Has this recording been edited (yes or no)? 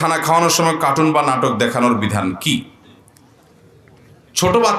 no